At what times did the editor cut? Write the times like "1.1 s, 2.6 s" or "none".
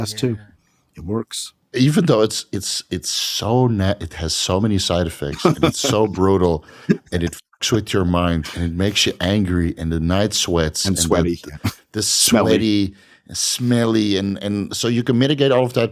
none